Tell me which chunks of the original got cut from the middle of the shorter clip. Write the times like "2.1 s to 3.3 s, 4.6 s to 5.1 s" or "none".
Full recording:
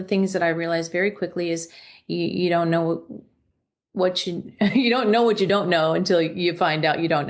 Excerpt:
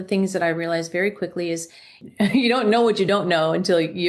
2.0 s to 4.4 s